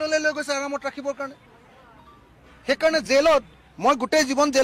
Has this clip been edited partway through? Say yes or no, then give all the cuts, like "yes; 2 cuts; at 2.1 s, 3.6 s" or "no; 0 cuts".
no; 0 cuts